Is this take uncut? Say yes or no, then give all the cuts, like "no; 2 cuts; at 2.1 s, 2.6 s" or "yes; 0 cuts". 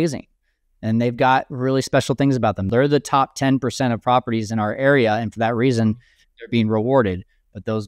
no; 1 cut; at 2.7 s